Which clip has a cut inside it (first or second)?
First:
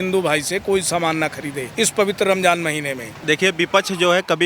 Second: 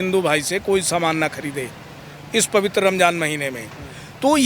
first